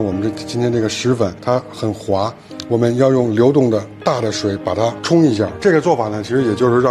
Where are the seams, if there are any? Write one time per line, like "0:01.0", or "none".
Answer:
0:05.5